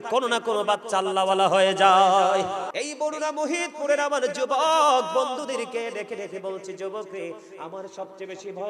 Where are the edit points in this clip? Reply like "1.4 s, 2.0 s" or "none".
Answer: 2.7 s